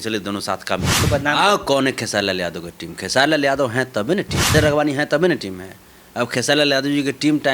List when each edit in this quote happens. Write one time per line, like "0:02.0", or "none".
0:01.0
0:04.5